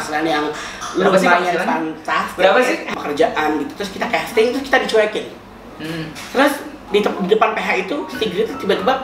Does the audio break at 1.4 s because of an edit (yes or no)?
no